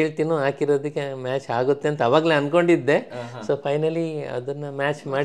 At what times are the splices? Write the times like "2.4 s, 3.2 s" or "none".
none